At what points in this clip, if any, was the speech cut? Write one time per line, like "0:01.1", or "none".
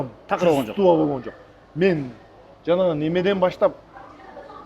none